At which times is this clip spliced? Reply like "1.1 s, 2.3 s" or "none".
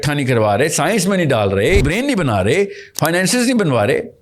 1.8 s